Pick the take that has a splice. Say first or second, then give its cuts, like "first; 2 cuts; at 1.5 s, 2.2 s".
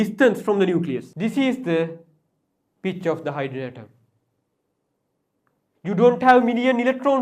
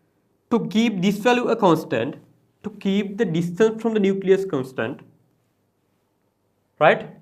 first; 1 cut; at 1.1 s